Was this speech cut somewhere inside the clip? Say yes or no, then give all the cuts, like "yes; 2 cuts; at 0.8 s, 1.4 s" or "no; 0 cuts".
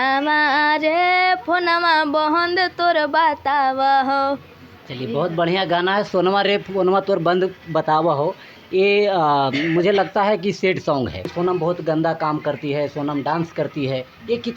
yes; 1 cut; at 11.3 s